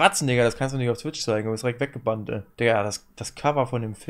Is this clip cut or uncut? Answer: cut